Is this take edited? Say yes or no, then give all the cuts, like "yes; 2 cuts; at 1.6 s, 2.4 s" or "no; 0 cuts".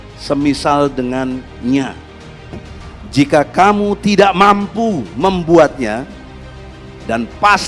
yes; 1 cut; at 2.6 s